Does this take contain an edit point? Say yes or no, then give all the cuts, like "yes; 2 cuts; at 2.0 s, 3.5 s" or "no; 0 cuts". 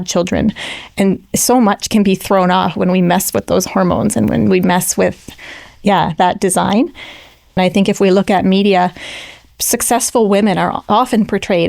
yes; 1 cut; at 7.6 s